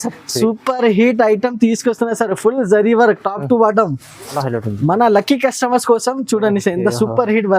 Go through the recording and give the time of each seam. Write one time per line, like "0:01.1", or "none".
0:04.3

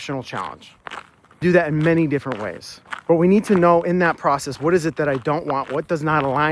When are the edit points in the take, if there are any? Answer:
0:01.4

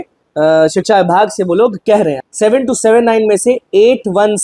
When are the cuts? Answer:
0:02.2

